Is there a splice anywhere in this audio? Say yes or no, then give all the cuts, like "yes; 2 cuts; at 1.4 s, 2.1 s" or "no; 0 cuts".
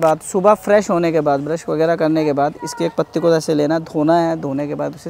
no; 0 cuts